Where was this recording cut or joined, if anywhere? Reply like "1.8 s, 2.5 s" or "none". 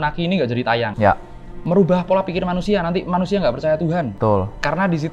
0.9 s, 4.1 s

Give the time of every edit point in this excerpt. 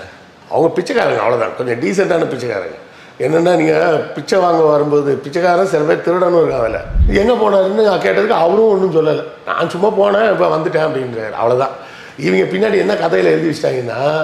6.9 s

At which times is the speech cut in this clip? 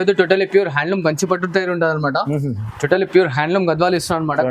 none

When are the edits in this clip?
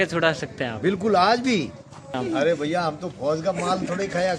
2.2 s

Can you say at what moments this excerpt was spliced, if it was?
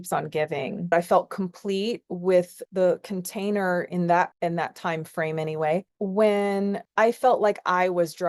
0.9 s, 2.6 s, 5.9 s

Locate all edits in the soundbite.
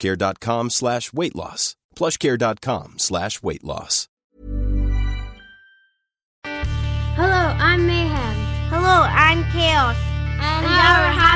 4.4 s, 6.4 s

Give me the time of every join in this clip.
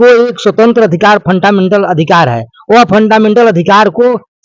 none

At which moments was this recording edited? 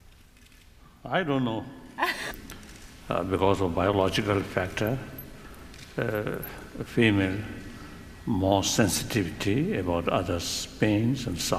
none

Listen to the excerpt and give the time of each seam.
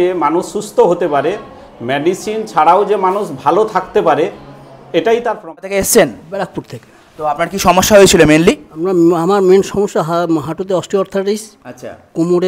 5.6 s

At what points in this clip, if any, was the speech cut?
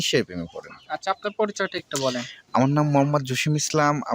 none

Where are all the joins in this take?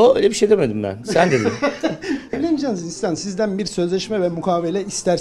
2.3 s

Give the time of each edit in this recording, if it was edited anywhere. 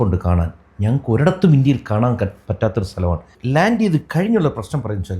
3.4 s

